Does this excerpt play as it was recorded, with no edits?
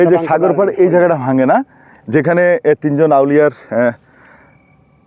yes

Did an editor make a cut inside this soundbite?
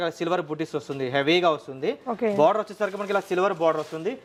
no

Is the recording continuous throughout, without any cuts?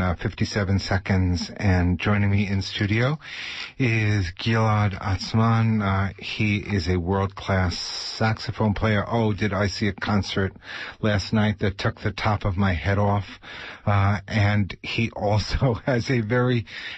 yes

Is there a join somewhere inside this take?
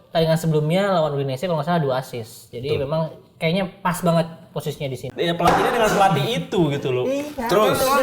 yes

